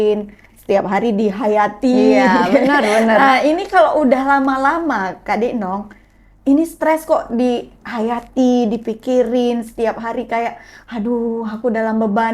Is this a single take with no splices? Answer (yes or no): yes